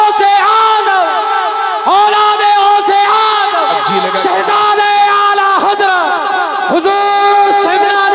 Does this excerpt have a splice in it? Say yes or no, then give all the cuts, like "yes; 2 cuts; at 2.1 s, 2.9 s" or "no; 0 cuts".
yes; 1 cut; at 4.1 s